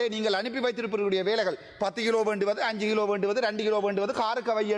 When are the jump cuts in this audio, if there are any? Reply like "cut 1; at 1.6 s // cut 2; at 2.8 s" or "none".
none